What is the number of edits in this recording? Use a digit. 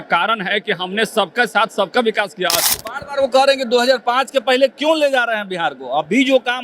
1